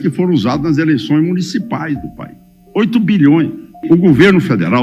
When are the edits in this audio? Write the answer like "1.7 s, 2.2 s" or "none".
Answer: 3.8 s